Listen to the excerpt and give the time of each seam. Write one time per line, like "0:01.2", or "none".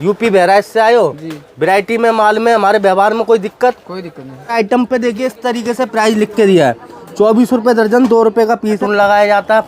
0:04.5
0:08.8